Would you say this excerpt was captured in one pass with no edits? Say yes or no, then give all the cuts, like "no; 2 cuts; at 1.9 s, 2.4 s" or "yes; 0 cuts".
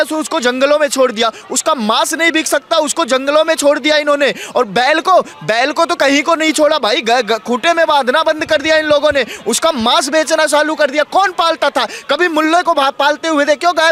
yes; 0 cuts